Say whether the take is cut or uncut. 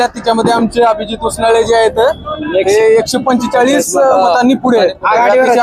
uncut